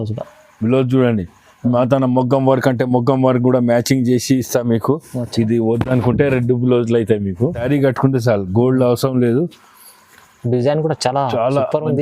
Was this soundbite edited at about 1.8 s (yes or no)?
no